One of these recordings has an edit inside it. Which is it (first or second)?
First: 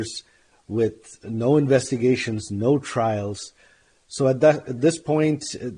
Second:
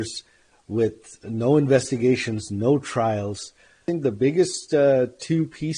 second